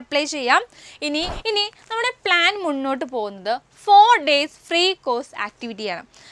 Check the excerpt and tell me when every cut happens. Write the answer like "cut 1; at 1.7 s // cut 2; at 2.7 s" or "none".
cut 1; at 1.3 s